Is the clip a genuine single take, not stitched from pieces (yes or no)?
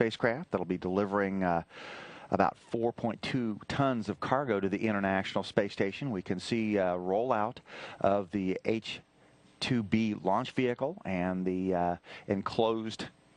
yes